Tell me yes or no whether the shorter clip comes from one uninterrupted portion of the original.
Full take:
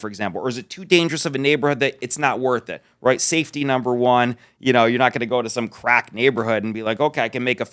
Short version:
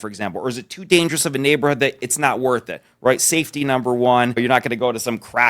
no